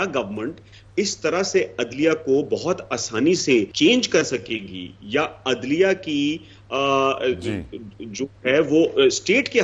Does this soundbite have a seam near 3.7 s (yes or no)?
yes